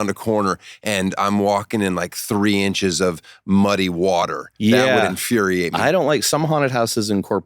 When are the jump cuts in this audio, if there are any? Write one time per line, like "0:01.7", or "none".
0:05.7